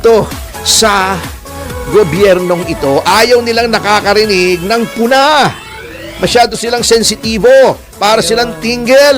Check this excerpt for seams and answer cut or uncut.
uncut